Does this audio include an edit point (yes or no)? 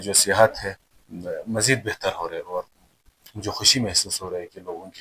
no